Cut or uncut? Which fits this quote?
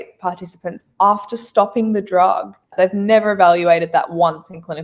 cut